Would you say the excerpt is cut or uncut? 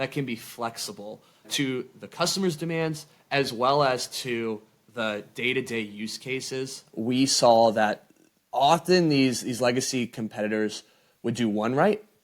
cut